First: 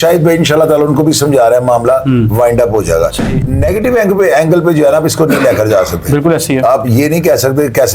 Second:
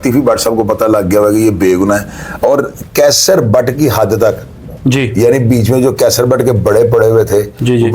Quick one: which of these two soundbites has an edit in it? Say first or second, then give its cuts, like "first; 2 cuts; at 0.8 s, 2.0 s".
first; 1 cut; at 3.3 s